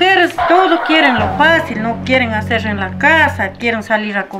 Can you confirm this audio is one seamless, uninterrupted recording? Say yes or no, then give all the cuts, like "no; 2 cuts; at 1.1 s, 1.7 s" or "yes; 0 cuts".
yes; 0 cuts